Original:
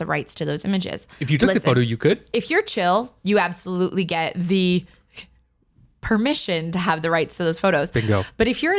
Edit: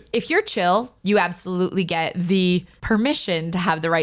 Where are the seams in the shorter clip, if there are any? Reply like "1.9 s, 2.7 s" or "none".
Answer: 2.7 s